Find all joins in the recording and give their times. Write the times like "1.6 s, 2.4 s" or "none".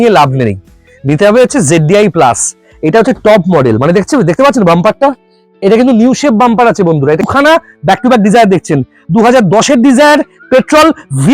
7.3 s